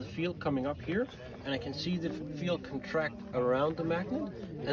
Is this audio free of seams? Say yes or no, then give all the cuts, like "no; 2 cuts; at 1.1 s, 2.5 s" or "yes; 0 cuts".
yes; 0 cuts